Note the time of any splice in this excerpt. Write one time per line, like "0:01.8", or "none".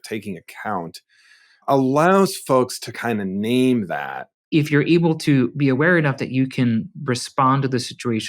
0:04.4

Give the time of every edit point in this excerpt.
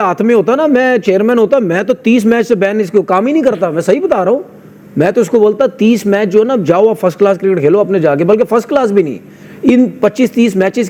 none

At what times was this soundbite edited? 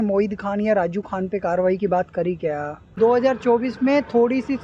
0:02.9

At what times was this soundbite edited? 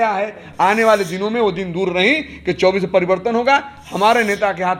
none

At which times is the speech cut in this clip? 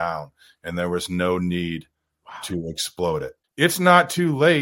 0:03.4

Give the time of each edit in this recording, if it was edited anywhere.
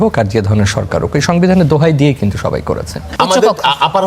0:03.0

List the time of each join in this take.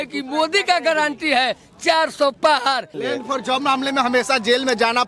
0:03.0

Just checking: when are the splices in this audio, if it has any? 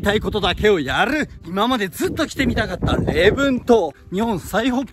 0:01.4
0:04.0

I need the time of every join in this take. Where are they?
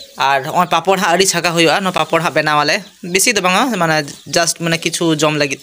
none

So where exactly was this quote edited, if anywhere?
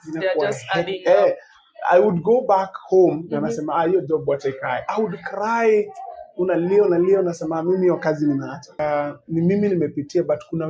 0:08.8

